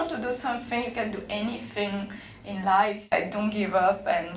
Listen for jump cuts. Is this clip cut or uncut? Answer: cut